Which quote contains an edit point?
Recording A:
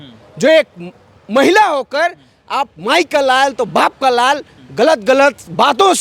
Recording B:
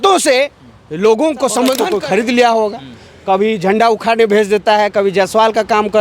B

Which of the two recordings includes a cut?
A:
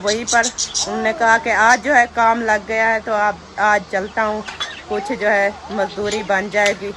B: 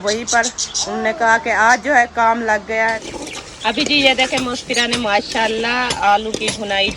B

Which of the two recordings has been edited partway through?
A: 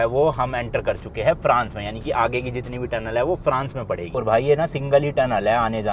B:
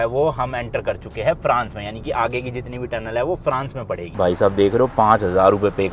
B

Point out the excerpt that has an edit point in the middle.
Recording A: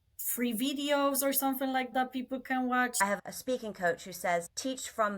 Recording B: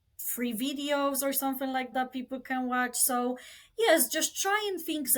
A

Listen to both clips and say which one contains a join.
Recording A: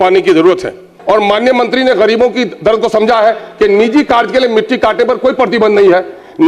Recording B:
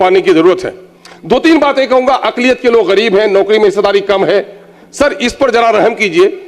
A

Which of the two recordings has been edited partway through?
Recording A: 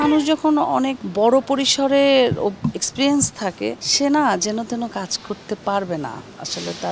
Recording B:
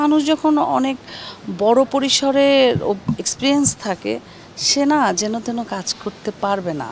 A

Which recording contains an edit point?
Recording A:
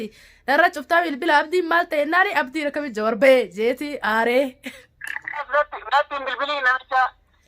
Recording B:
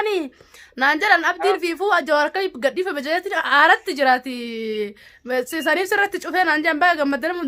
A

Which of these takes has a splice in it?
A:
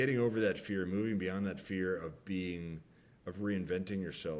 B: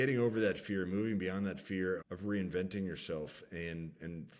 B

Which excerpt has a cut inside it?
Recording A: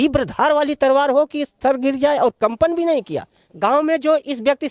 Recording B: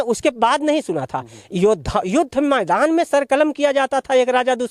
A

